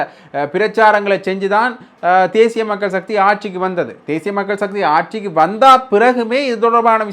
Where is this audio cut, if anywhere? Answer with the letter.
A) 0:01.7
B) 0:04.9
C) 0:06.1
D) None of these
D